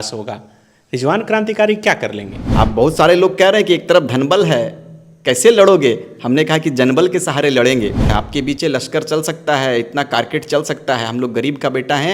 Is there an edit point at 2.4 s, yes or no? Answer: yes